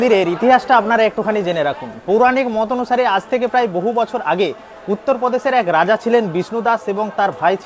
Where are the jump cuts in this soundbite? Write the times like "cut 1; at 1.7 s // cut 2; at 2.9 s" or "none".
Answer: none